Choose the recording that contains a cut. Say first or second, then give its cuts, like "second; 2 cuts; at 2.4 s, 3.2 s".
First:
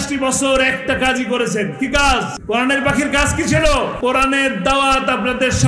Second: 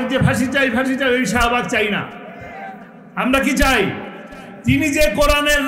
first; 2 cuts; at 2.3 s, 3.9 s